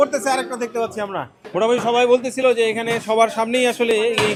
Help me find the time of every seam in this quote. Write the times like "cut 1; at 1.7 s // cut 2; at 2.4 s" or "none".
none